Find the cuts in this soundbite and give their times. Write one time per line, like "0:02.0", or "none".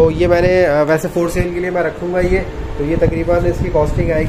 none